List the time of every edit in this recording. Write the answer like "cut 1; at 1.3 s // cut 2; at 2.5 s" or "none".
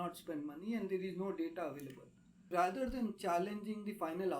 cut 1; at 2.5 s